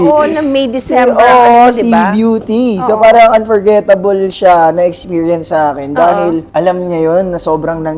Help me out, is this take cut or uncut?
uncut